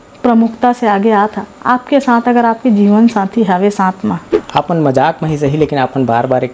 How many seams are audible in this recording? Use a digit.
1